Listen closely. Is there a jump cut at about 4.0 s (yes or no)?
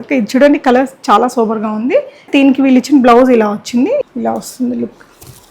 yes